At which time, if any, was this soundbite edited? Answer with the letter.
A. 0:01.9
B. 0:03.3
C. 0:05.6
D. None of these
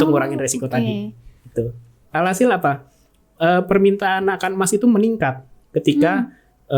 A